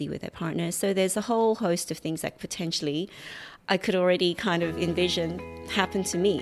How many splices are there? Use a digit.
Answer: 1